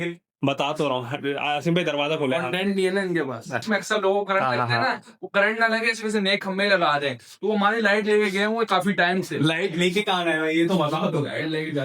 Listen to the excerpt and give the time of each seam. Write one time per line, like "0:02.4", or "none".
0:03.6